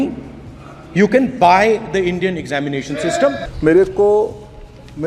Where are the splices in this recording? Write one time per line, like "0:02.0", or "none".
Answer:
0:03.5

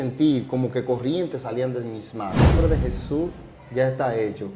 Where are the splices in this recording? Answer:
0:02.6

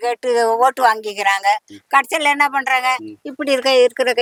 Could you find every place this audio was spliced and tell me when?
none

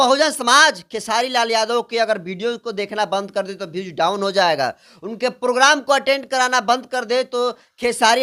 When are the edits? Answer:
none

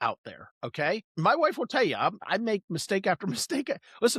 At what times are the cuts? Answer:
0:01.1
0:02.2

